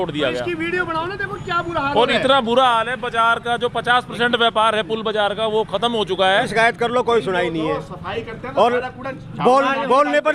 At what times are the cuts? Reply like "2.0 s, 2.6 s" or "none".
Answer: 6.5 s